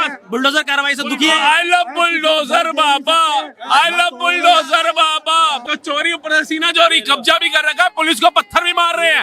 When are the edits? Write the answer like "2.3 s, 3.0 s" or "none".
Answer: 5.6 s